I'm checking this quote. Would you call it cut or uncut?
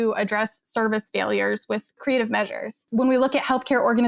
cut